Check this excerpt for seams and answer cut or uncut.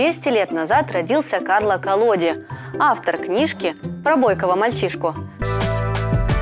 cut